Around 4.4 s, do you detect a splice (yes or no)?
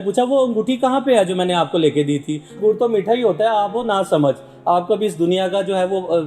no